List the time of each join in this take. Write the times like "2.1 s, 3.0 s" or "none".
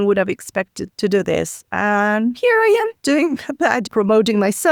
none